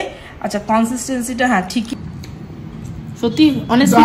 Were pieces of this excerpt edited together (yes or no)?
yes